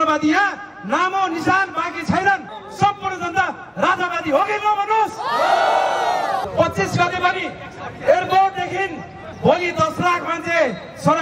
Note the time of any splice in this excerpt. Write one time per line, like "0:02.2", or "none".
0:02.6
0:06.4